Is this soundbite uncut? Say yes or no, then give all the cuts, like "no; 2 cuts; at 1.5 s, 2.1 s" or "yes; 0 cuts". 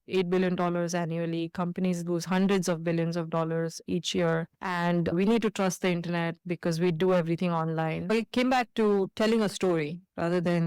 no; 3 cuts; at 3.8 s, 5.1 s, 8.1 s